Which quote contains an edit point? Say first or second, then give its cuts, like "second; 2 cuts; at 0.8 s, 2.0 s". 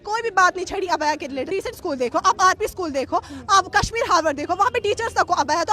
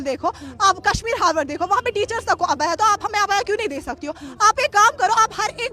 first; 1 cut; at 1.5 s